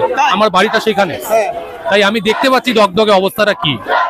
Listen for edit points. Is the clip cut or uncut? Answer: uncut